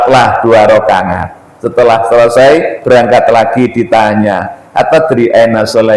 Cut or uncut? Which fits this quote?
uncut